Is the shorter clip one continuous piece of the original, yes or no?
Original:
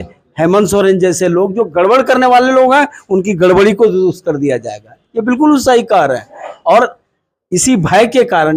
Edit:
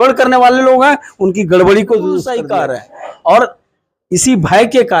no